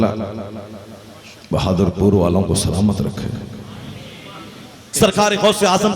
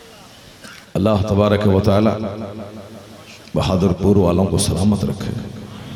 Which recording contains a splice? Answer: first; 1 cut; at 4.9 s

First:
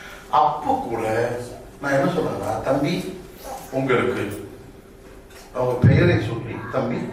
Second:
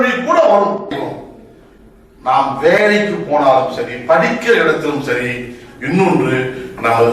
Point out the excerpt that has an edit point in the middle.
second; 1 cut; at 0.9 s

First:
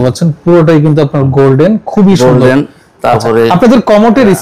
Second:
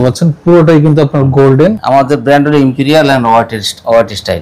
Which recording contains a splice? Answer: second; 1 cut; at 1.8 s

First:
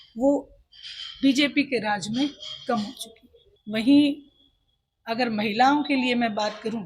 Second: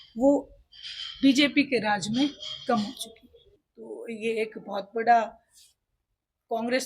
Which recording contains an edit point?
second; 1 cut; at 3.6 s

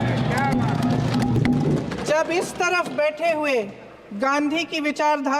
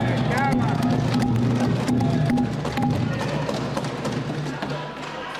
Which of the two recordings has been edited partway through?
first; 1 cut; at 1.4 s

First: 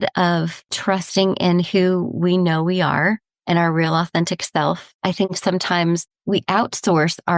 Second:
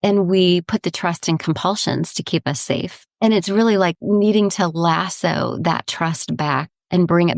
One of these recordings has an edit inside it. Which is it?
first; 2 cuts; at 4.9 s, 6.1 s

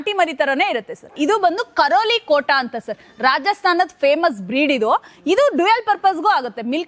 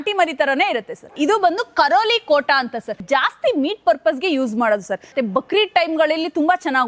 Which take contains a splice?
second; 2 cuts; at 3.0 s, 5.1 s

